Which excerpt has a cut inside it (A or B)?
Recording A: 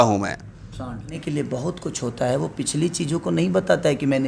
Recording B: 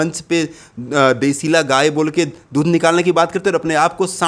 A